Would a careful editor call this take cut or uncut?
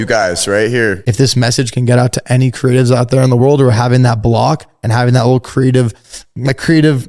cut